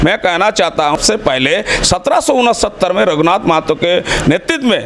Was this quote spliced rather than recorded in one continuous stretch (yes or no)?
yes